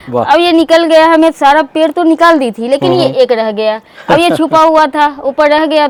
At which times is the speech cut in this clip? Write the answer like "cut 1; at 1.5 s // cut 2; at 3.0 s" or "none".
none